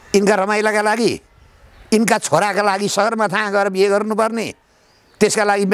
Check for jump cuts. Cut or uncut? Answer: uncut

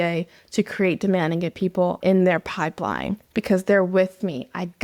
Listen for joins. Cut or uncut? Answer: cut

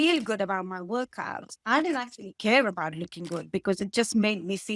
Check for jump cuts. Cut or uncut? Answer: uncut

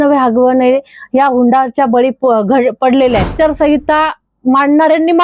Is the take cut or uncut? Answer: cut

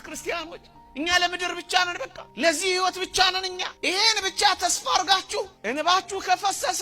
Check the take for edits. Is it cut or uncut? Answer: cut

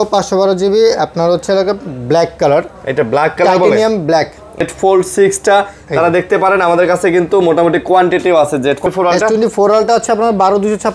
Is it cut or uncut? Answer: cut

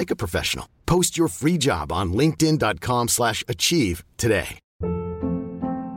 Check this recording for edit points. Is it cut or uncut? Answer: cut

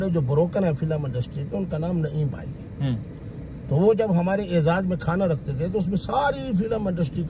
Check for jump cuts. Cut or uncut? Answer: uncut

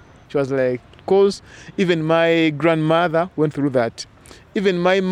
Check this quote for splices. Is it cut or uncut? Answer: uncut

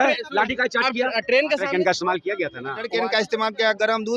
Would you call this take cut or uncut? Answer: cut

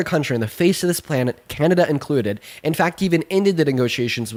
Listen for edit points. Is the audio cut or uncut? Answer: uncut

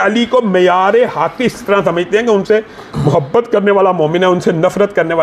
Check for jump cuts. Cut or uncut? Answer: uncut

